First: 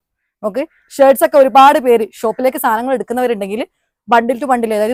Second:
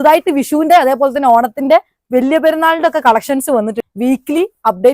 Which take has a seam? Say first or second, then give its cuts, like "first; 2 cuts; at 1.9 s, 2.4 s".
second; 1 cut; at 3.8 s